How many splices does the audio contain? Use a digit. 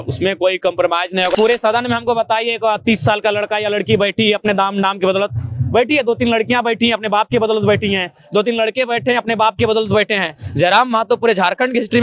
1